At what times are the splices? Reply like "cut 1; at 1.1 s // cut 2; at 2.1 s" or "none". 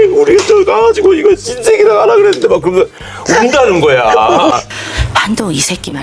cut 1; at 4.7 s